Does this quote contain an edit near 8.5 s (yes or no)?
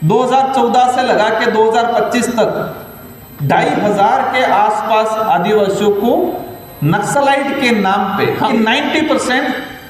yes